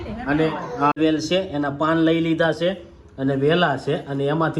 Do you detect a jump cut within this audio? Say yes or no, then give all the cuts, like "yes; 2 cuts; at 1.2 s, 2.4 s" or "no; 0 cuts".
yes; 1 cut; at 1.0 s